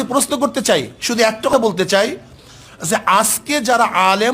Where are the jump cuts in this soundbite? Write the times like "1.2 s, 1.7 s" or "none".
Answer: 1.5 s